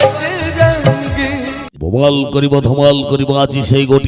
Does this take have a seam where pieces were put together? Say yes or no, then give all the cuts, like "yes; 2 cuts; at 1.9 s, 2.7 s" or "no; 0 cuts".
no; 0 cuts